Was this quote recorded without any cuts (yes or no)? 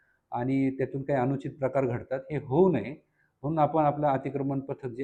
yes